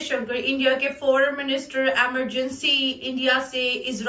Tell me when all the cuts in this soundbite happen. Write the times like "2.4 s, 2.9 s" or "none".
none